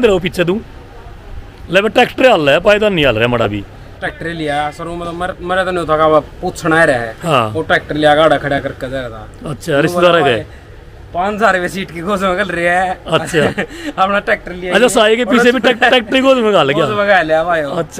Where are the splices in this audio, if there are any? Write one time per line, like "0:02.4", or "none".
0:03.9